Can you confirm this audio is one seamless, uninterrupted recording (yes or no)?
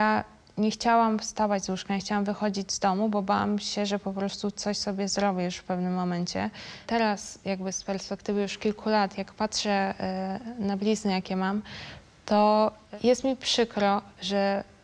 no